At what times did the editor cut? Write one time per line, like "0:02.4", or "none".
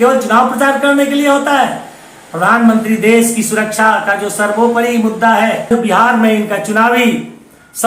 0:05.7